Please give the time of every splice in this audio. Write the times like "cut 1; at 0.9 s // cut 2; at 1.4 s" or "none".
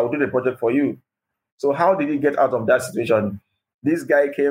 cut 1; at 1.3 s